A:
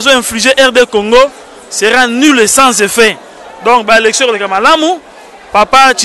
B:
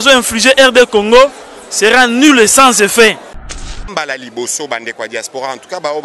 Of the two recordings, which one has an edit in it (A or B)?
B